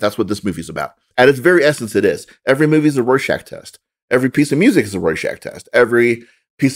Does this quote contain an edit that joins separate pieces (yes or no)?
yes